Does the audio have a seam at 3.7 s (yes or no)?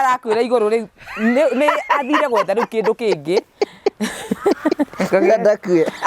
no